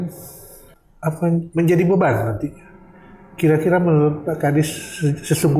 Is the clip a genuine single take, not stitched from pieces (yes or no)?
yes